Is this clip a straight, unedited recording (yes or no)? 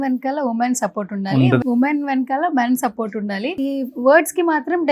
no